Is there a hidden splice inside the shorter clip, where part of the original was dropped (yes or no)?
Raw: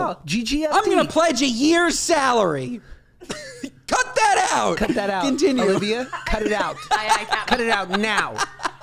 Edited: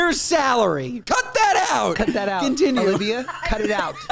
yes